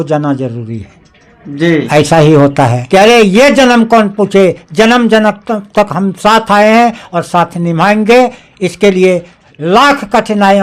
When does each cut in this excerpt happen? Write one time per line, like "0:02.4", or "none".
0:02.8